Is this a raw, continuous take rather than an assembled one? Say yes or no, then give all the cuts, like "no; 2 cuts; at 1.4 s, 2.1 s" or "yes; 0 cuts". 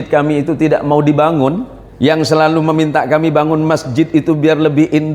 no; 1 cut; at 2.3 s